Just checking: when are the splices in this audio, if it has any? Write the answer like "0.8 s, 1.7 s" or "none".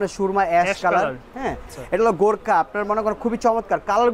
1.7 s